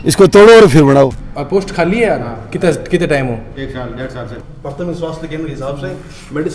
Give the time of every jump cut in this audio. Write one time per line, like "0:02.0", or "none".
0:01.2
0:04.3